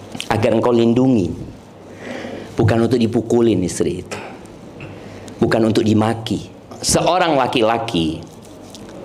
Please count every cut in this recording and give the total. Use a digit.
1